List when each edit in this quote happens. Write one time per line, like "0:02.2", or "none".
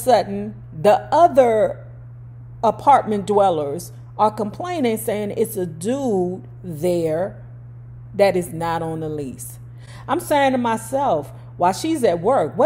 none